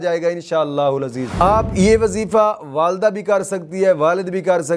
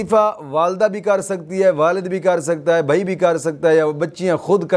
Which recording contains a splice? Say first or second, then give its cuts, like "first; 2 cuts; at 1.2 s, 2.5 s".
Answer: first; 1 cut; at 1.3 s